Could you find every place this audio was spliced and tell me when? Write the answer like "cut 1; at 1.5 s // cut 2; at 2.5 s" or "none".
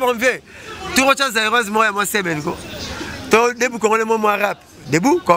none